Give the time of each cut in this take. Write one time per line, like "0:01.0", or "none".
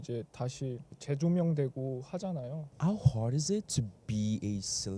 0:02.6